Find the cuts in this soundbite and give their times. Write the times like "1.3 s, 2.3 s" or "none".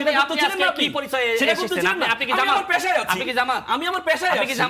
none